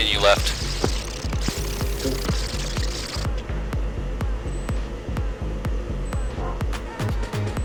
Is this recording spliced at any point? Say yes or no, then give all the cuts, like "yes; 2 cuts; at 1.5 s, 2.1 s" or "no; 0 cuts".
no; 0 cuts